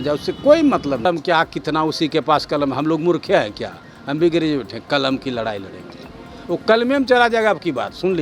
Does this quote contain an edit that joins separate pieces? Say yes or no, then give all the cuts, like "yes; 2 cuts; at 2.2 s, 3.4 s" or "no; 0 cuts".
yes; 1 cut; at 1.0 s